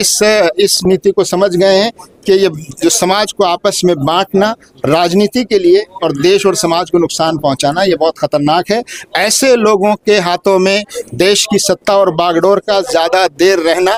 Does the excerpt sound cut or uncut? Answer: uncut